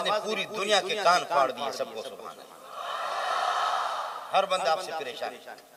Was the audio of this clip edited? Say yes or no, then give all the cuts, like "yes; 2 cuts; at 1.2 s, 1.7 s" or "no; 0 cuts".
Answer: no; 0 cuts